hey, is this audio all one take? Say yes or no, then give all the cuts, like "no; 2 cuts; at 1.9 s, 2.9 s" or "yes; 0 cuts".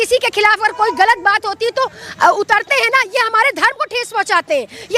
yes; 0 cuts